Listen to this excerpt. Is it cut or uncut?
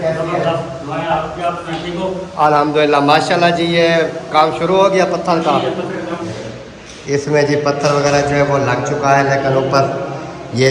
cut